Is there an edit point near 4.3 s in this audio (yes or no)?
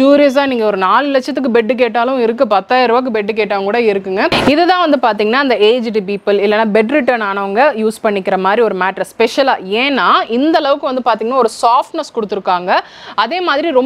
yes